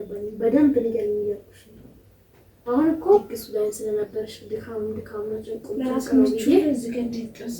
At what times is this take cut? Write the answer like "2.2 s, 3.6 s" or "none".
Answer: 3.4 s